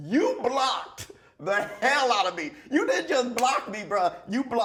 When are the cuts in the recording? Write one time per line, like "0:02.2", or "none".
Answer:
none